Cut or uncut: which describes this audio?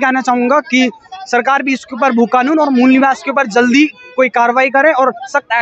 uncut